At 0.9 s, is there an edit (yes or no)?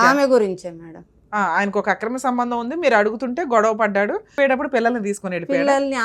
no